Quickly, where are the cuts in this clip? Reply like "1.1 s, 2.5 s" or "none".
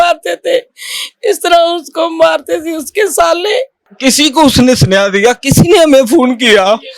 3.8 s